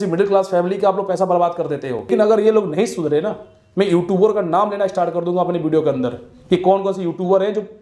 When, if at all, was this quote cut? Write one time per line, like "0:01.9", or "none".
0:02.1